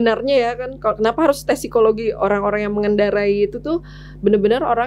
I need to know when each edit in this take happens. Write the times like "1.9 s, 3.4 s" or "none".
none